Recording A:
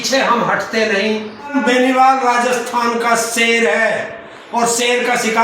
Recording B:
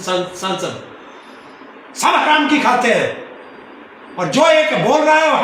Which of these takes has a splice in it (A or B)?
A